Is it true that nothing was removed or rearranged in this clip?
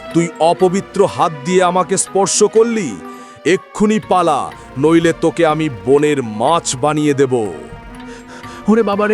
yes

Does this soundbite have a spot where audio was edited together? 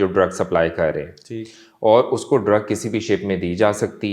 no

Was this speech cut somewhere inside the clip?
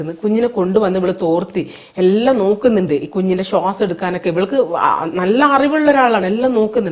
no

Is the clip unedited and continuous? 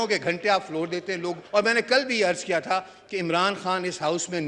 no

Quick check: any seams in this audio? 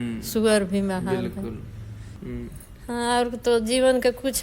yes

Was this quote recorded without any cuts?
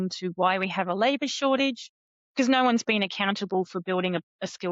yes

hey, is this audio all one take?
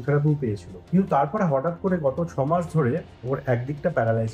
yes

